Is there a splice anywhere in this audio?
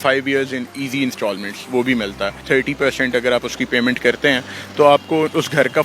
yes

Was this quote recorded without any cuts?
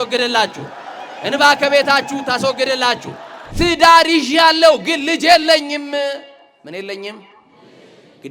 no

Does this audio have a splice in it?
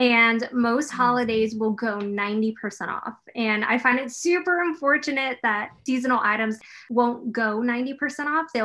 yes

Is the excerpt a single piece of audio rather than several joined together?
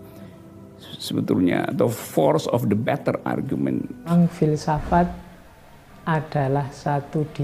no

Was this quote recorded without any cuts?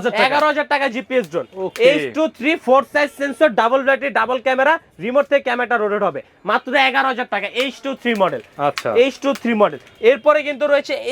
yes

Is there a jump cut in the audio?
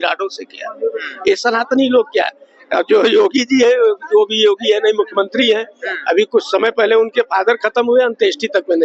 no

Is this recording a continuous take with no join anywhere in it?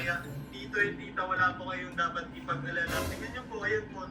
no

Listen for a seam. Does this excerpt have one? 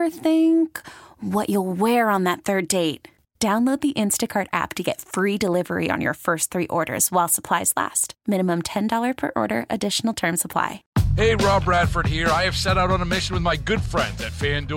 yes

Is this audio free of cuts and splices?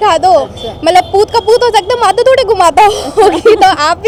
yes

